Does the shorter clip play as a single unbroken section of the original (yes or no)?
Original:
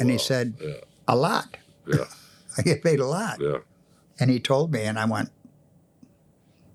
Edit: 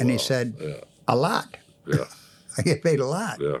yes